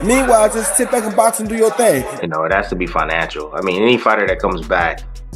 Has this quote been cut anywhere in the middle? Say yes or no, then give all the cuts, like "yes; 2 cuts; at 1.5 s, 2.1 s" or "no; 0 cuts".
yes; 1 cut; at 2.1 s